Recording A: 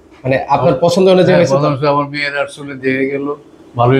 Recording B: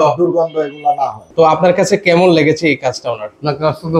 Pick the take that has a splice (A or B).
B